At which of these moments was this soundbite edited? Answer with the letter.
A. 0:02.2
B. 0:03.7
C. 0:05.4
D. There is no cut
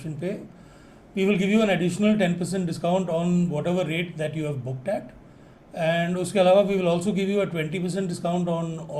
D